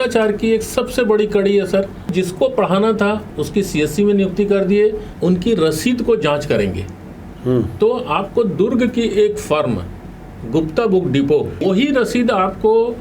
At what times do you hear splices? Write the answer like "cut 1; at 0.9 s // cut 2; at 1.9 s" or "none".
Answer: cut 1; at 2.1 s // cut 2; at 5.1 s // cut 3; at 11.5 s

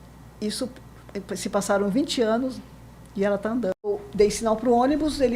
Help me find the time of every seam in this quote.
cut 1; at 3.9 s

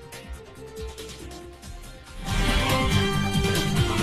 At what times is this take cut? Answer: none

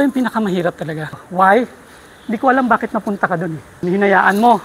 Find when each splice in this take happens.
cut 1; at 1.2 s // cut 2; at 3.8 s

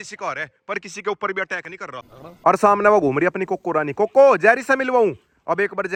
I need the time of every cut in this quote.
none

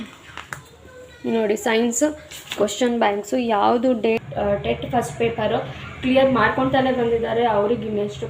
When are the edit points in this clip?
cut 1; at 4.3 s

